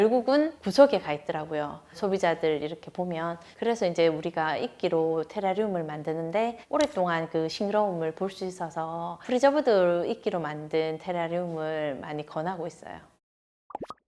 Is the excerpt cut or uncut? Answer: uncut